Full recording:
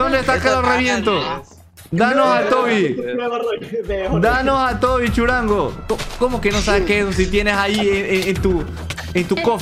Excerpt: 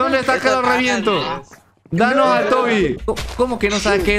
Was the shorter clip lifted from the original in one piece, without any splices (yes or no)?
no